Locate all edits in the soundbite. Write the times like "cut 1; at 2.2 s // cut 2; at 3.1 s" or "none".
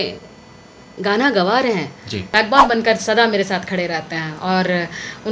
cut 1; at 2.1 s